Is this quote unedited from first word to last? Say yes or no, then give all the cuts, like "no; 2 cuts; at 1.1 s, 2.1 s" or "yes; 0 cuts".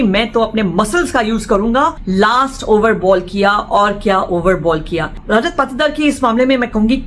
no; 2 cuts; at 2.0 s, 5.1 s